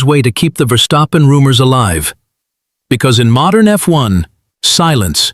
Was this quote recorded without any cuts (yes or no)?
yes